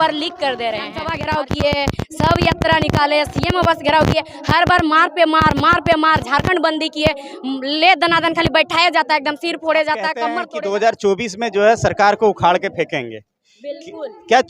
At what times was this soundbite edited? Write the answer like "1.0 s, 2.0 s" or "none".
1.1 s, 10.4 s